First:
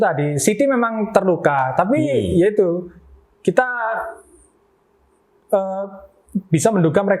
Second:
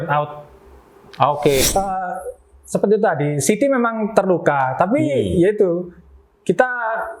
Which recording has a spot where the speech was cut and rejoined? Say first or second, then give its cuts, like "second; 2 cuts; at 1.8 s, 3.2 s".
second; 1 cut; at 1.6 s